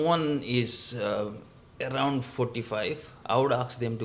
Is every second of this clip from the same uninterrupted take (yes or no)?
no